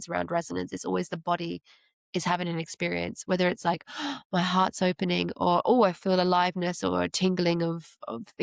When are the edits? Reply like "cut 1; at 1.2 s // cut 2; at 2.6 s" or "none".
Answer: none